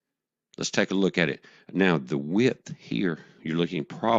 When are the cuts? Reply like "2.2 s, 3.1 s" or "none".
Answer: none